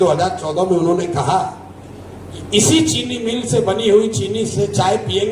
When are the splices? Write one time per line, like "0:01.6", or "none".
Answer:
none